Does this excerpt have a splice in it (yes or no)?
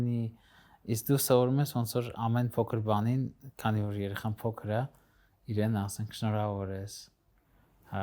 no